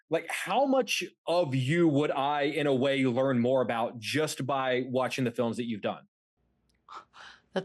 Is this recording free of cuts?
yes; 0 cuts

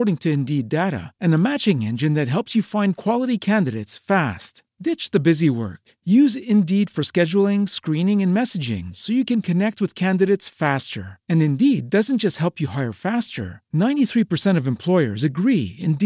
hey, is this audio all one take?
yes; 0 cuts

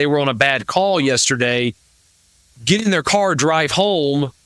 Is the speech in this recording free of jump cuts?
yes; 0 cuts

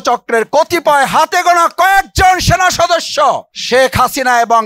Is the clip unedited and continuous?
no; 1 cut; at 3.5 s

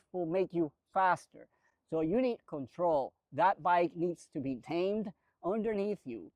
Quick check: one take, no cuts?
yes; 0 cuts

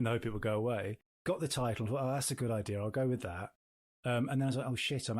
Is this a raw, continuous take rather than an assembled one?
no; 1 cut; at 1.1 s

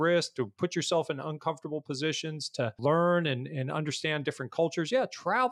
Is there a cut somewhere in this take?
yes; 1 cut; at 2.8 s

